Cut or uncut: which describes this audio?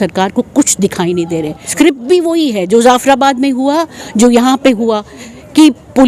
cut